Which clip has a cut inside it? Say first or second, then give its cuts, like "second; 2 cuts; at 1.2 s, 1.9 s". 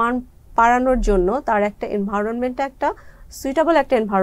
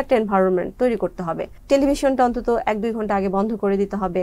second; 1 cut; at 1.6 s